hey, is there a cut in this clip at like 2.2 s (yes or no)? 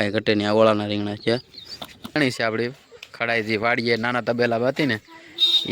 yes